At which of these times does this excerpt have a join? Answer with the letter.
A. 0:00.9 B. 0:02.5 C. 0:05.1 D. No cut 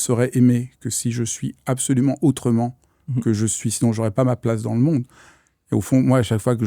D